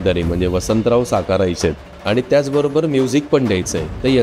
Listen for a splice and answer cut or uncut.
cut